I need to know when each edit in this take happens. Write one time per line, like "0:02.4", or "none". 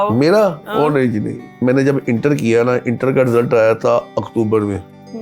0:01.4